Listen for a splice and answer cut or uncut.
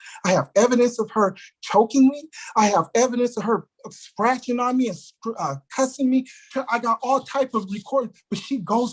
cut